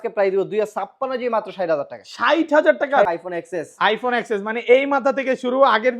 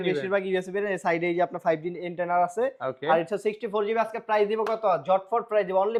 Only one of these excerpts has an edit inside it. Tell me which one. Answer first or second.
first